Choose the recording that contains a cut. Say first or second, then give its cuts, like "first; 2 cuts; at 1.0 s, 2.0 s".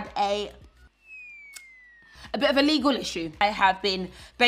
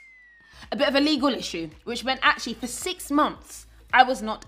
first; 1 cut; at 3.4 s